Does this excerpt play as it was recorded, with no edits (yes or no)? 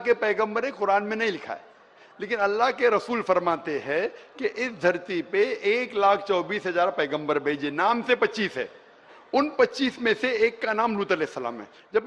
yes